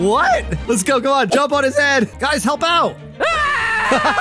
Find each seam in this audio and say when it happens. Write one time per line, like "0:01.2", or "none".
0:01.3
0:02.1